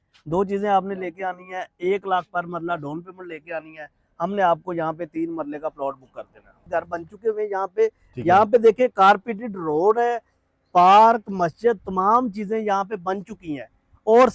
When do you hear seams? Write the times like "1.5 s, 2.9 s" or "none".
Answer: 6.6 s